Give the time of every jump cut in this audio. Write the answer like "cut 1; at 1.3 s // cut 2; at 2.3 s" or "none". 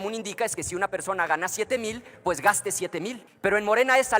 cut 1; at 3.2 s